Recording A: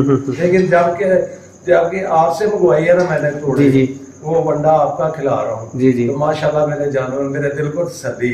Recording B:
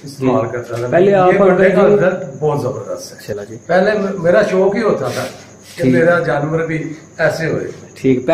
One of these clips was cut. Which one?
B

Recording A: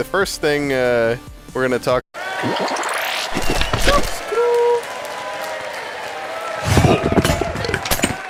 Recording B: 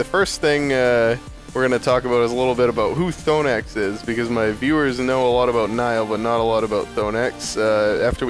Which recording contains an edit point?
B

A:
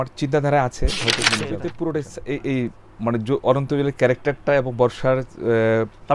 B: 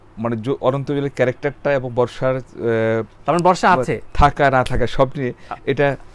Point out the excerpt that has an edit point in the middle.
A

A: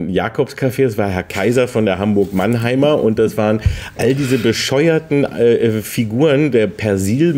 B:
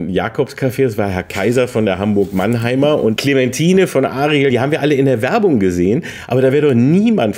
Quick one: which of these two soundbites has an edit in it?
B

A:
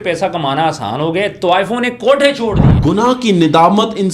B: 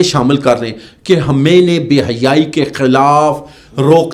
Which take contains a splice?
A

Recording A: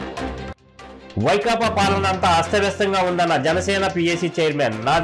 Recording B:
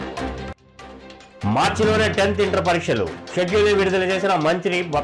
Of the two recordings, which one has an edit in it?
A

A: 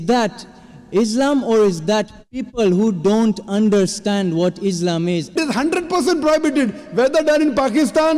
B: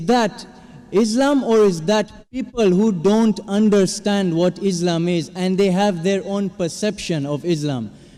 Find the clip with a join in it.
A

